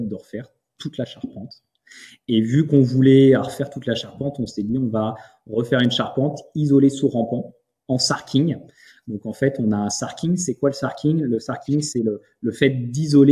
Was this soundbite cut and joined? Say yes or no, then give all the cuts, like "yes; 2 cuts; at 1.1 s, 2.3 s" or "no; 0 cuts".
no; 0 cuts